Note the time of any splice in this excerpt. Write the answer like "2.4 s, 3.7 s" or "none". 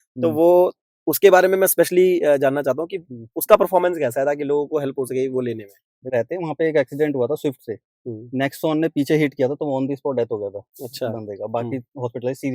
6.1 s